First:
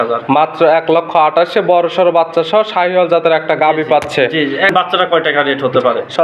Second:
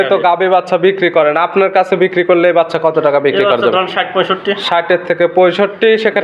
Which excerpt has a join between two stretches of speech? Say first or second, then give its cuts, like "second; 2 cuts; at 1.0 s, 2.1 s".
first; 1 cut; at 4.7 s